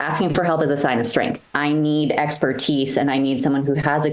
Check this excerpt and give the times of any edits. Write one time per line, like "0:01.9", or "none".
0:01.5